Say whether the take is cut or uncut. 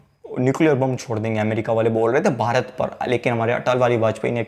uncut